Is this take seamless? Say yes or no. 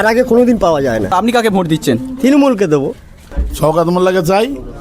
no